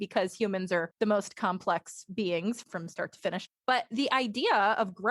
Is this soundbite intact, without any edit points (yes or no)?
no